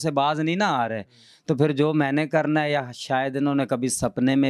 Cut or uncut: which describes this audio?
uncut